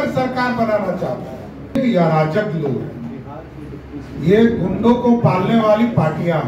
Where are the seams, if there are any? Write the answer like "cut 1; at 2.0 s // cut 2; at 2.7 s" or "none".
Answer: cut 1; at 1.8 s